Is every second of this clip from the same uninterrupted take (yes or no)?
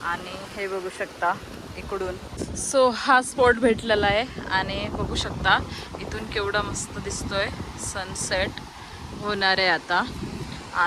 no